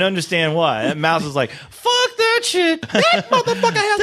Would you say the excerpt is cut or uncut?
cut